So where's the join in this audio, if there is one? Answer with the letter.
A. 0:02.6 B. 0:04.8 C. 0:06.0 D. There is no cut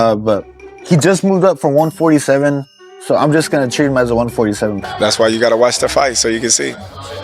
B